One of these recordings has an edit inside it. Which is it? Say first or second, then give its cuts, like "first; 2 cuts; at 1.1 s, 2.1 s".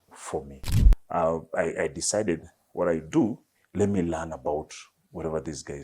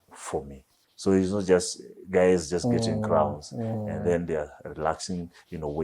first; 1 cut; at 0.9 s